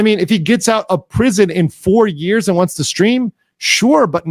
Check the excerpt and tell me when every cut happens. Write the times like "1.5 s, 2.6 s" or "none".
none

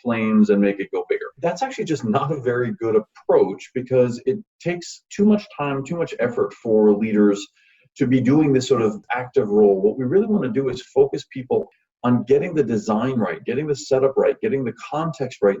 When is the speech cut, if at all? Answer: 1.3 s

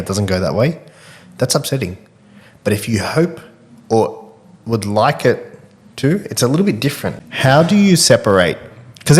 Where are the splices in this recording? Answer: 7.2 s

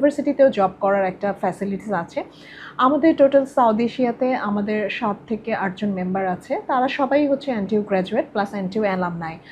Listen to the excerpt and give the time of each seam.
none

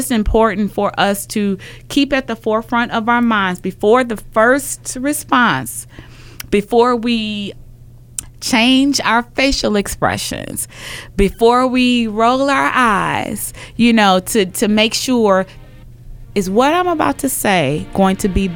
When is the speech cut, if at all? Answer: 7.5 s, 15.6 s

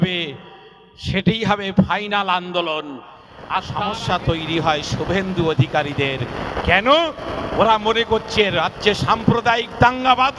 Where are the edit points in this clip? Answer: 3.7 s

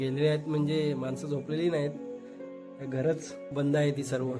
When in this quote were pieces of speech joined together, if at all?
none

